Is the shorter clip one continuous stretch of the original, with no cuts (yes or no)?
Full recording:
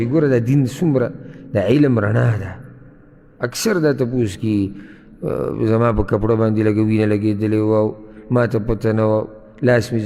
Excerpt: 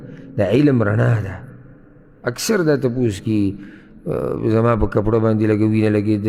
yes